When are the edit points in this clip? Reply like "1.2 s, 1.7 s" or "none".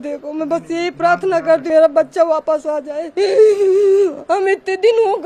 1.6 s